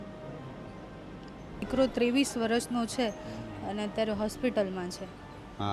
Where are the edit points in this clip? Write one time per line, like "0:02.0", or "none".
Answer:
0:01.7